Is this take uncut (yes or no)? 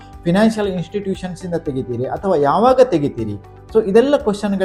yes